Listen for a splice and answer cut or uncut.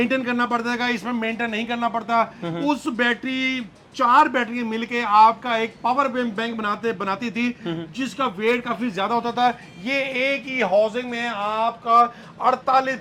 uncut